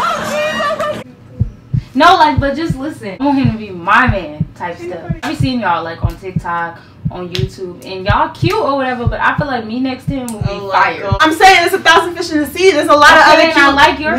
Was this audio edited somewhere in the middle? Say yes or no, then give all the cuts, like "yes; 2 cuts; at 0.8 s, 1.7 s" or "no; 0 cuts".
yes; 3 cuts; at 3.2 s, 5.3 s, 11.2 s